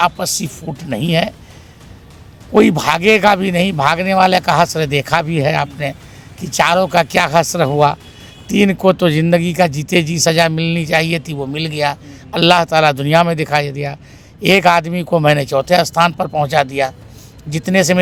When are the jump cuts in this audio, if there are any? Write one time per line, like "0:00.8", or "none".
none